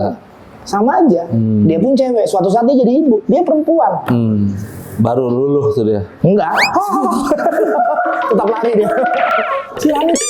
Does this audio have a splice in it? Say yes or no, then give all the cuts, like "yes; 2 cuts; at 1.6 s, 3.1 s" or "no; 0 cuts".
no; 0 cuts